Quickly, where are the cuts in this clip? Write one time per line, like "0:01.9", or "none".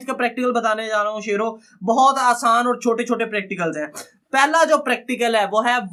none